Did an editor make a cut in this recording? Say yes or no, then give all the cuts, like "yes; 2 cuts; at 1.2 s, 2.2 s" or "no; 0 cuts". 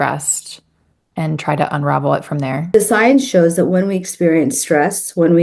yes; 1 cut; at 2.7 s